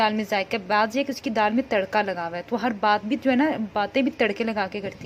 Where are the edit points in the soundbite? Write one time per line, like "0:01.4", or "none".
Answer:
none